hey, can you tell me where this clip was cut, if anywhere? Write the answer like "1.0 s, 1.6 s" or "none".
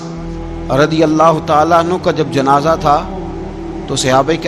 none